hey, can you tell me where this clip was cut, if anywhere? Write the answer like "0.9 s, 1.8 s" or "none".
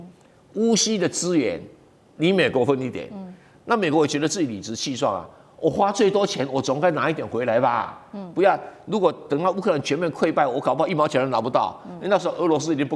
none